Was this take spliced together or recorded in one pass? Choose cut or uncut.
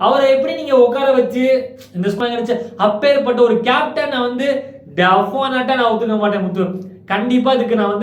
cut